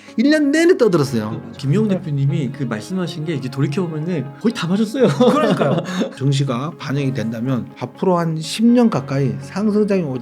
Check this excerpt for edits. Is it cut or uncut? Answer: cut